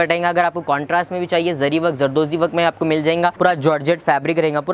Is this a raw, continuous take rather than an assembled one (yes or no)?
no